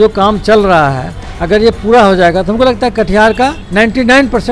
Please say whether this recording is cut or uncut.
cut